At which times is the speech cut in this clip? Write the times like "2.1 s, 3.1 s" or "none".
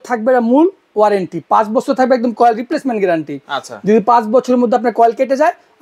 none

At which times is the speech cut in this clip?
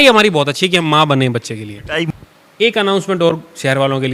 2.1 s

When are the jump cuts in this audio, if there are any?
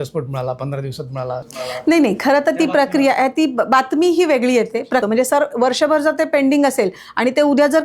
5.0 s

